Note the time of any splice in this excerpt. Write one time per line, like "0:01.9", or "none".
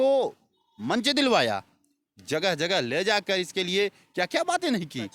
none